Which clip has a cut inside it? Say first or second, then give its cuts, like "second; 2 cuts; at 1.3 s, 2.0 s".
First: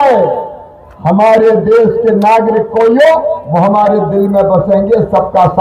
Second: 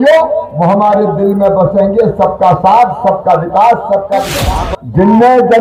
second; 1 cut; at 4.4 s